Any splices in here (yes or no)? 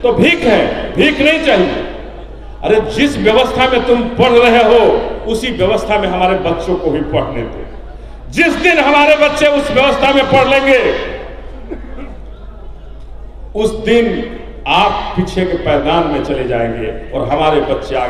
no